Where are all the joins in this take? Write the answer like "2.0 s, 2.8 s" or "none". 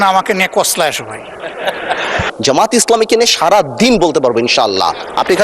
2.2 s